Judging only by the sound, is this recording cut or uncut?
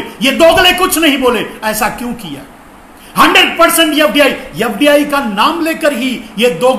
uncut